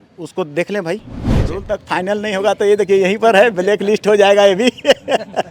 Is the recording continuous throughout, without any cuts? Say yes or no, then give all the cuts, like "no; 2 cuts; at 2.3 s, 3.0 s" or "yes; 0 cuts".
no; 1 cut; at 1.4 s